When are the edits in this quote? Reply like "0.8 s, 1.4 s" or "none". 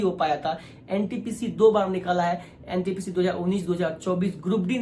none